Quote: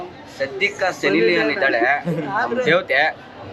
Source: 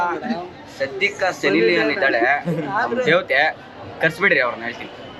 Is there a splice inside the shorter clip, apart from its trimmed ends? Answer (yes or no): no